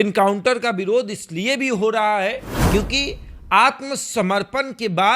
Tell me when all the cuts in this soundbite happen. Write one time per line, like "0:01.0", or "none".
0:02.5